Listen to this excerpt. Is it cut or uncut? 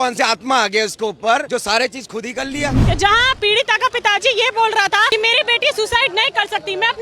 cut